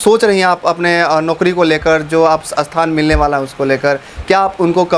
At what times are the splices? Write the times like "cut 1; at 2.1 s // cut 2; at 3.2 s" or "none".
none